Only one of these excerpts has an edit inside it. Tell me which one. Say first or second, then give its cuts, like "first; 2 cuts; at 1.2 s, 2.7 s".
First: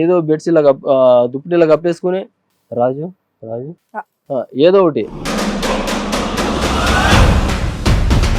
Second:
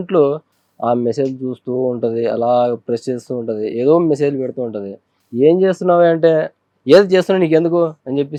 first; 1 cut; at 5.2 s